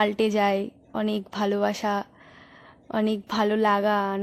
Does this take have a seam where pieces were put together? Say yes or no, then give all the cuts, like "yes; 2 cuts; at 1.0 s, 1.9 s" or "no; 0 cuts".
no; 0 cuts